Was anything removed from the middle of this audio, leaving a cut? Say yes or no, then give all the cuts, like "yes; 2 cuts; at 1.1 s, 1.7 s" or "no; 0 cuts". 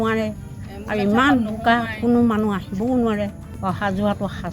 yes; 1 cut; at 3.5 s